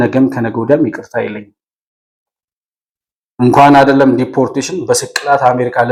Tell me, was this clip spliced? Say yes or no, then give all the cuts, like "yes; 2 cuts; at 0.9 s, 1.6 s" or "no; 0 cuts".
no; 0 cuts